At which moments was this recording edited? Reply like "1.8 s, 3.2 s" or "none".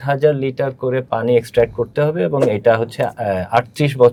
none